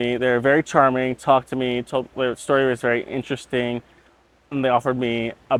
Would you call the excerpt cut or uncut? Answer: uncut